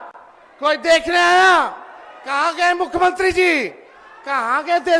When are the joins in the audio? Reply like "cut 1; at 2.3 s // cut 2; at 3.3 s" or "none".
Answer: none